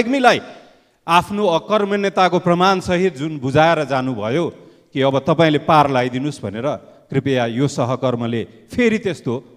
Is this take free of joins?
yes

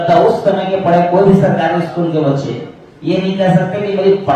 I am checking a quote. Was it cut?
no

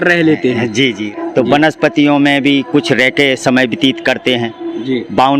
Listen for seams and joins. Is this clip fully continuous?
no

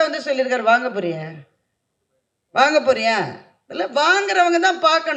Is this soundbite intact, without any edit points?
yes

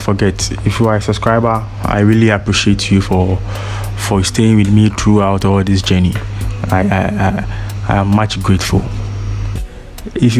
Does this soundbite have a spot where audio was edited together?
no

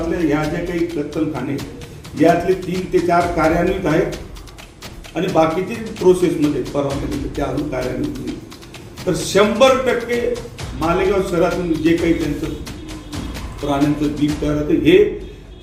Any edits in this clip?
no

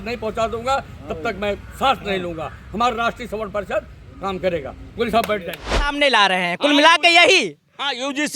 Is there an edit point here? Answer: yes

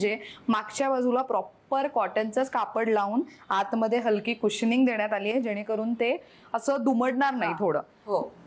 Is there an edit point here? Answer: no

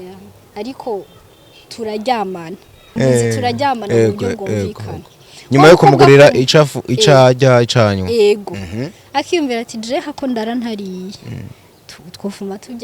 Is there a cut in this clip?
yes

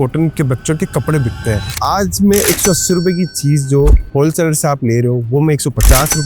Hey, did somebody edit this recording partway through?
yes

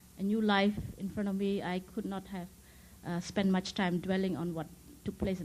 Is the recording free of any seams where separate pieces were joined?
yes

